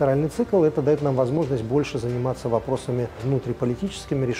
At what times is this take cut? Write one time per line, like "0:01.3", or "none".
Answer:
0:03.2